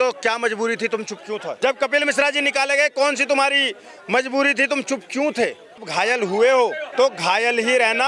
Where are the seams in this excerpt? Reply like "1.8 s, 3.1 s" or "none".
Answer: 1.6 s, 5.8 s, 6.8 s